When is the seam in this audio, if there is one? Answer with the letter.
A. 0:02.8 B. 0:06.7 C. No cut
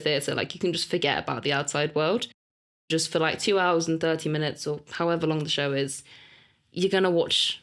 A